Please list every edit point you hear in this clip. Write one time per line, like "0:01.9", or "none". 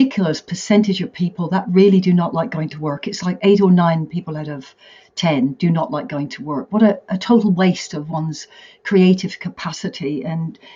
none